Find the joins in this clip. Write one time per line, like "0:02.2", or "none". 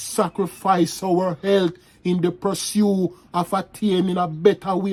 none